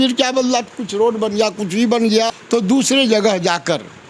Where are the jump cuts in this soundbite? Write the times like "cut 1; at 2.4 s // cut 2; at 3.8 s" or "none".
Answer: cut 1; at 2.4 s